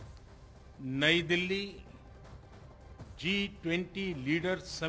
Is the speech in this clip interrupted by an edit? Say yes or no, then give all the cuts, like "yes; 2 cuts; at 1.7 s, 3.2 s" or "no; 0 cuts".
yes; 3 cuts; at 0.7 s, 1.7 s, 3.2 s